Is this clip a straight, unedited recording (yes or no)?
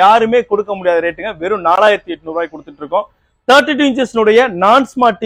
yes